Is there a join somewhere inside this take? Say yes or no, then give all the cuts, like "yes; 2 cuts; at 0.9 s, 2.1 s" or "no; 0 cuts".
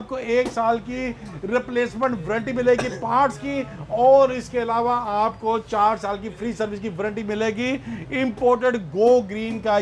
no; 0 cuts